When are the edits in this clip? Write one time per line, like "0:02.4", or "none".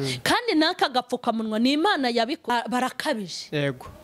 0:02.5